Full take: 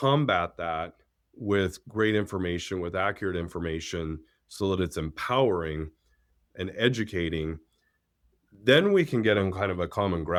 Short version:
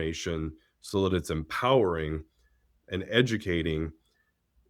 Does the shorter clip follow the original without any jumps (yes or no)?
yes